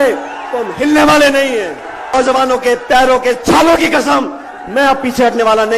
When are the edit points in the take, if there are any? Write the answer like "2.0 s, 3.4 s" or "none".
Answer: 2.1 s